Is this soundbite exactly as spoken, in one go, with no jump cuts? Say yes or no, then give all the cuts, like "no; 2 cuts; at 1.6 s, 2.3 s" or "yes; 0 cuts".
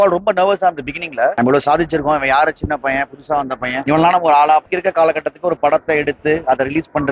no; 2 cuts; at 1.4 s, 4.7 s